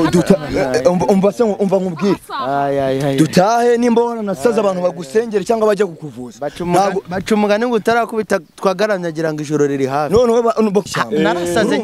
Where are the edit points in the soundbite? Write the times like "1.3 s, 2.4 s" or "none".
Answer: 10.9 s